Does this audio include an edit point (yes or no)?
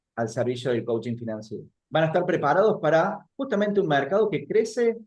no